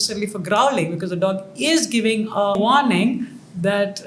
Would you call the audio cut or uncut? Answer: cut